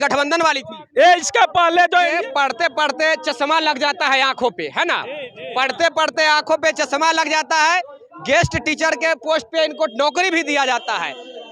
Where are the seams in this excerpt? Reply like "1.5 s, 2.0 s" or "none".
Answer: 2.1 s